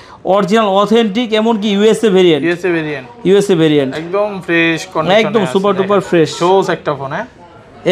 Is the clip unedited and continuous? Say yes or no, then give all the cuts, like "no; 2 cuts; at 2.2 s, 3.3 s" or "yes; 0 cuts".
yes; 0 cuts